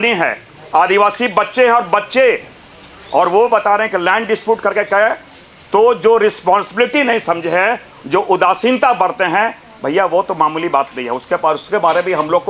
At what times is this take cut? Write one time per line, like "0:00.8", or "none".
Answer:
none